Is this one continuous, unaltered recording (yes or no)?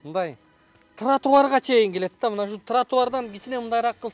yes